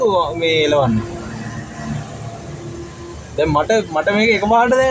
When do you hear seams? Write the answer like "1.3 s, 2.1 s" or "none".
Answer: none

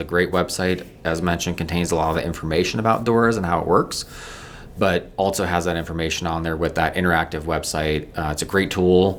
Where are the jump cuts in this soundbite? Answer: none

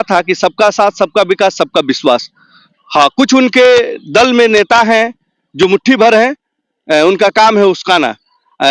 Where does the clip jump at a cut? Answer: none

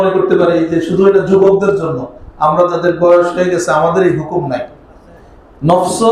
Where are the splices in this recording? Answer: none

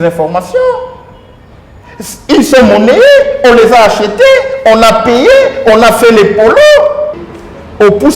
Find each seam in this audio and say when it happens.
7.2 s

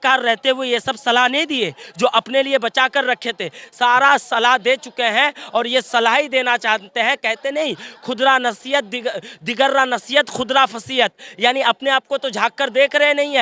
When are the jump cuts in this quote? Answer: none

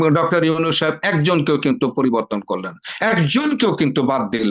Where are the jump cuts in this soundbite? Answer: none

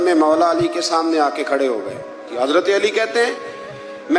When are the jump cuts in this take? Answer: 2.3 s

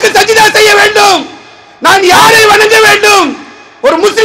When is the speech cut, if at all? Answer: none

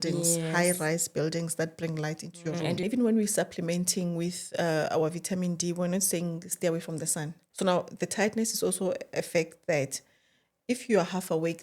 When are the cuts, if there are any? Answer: 2.8 s, 7.4 s

